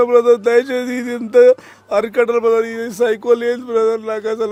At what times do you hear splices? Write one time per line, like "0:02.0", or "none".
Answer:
none